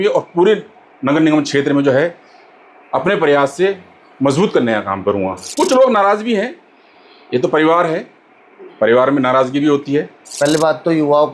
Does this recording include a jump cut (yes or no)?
yes